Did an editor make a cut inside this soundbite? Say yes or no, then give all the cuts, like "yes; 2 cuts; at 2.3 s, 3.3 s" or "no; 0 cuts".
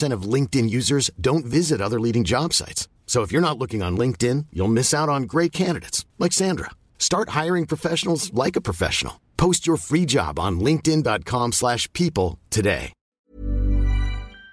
yes; 1 cut; at 12.9 s